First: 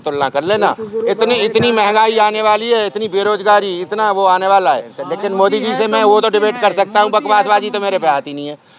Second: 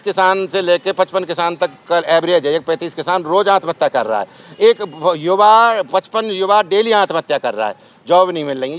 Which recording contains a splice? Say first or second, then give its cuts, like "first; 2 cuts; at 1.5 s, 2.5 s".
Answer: first; 1 cut; at 5.0 s